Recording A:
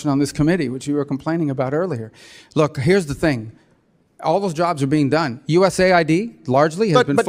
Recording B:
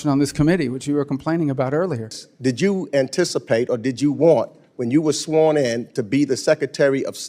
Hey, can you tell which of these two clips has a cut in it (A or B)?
B